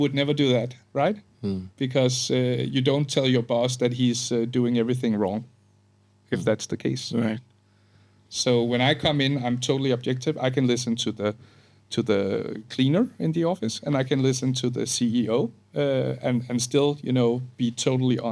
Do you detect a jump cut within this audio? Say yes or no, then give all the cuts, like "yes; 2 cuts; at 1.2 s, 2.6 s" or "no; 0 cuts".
no; 0 cuts